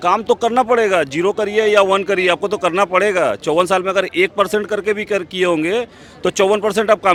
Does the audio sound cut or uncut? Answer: uncut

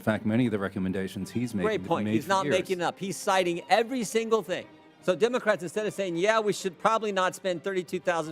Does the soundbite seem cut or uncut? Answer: cut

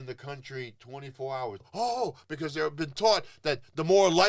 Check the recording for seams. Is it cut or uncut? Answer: cut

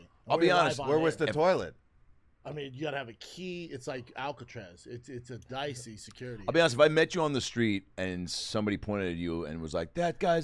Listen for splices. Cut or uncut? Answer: cut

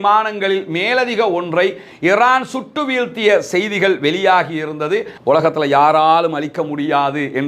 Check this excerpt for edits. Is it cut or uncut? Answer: cut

